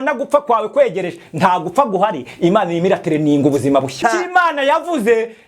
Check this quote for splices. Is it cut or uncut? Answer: cut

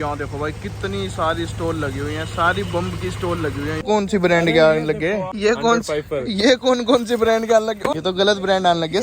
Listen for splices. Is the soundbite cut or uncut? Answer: cut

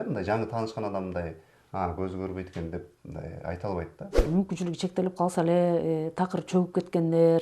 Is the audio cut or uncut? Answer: cut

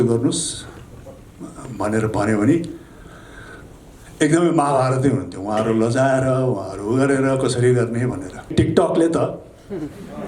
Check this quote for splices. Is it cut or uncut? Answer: cut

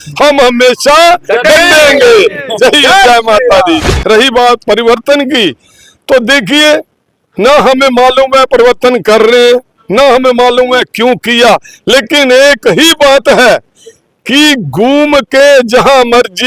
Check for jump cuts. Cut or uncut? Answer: cut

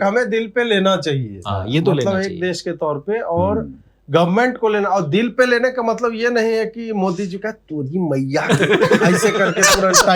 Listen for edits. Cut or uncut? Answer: uncut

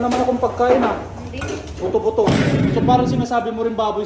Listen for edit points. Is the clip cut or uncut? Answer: cut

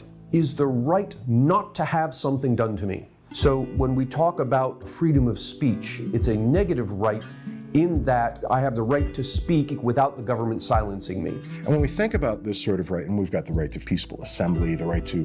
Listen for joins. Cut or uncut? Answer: uncut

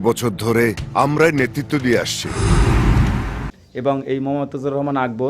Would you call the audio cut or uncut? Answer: cut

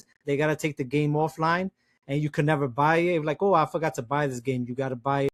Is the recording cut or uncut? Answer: uncut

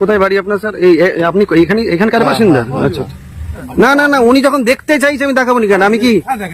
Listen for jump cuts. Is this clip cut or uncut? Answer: uncut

